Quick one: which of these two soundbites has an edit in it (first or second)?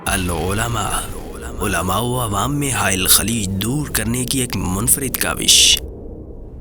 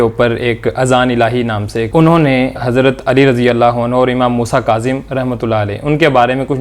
second